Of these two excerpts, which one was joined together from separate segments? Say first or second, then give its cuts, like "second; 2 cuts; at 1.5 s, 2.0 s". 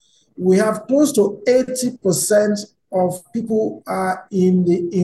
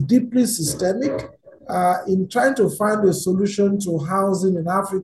first; 1 cut; at 3.3 s